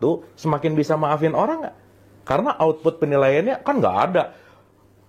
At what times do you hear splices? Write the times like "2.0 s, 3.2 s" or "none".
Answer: none